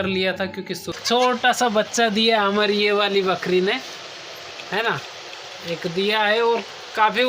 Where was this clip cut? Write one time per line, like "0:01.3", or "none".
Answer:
0:00.9